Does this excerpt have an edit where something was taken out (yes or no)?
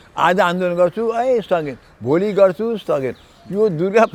no